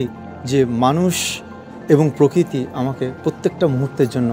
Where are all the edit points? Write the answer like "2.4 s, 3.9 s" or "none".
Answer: none

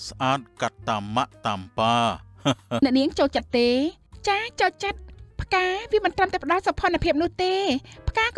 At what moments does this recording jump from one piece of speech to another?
2.8 s

